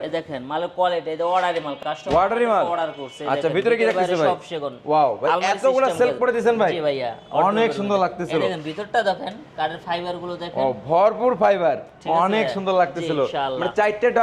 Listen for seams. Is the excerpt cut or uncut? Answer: uncut